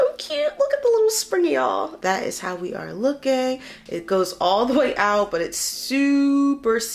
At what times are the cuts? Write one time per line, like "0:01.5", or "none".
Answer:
0:01.9